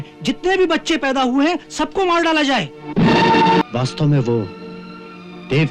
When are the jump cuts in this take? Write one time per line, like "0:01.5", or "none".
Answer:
0:03.6